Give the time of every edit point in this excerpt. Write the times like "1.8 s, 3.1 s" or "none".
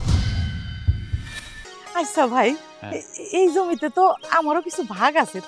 1.7 s